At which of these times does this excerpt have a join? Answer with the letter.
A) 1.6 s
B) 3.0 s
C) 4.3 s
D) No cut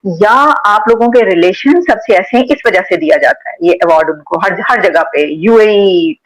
D